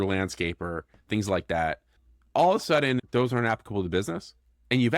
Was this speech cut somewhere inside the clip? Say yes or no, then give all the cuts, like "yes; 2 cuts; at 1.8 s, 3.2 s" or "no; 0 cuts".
yes; 1 cut; at 3.0 s